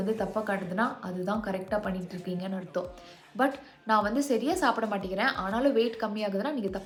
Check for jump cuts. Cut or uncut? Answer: uncut